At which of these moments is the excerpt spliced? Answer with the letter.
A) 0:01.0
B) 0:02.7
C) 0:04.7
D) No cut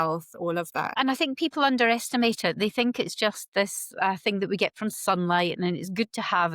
A